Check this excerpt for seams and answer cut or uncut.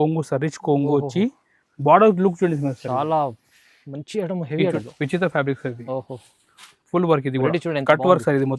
cut